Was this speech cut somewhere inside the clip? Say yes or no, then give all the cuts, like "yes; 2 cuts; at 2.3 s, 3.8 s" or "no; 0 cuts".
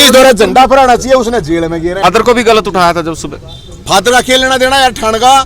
yes; 1 cut; at 2.0 s